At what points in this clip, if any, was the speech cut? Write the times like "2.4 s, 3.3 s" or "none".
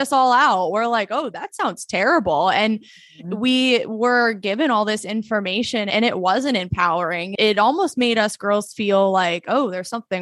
5.9 s, 7.3 s